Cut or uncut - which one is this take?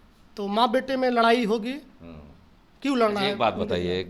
uncut